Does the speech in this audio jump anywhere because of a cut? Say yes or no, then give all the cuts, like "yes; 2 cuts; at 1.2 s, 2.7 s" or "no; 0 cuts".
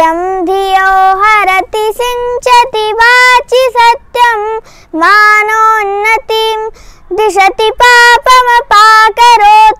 no; 0 cuts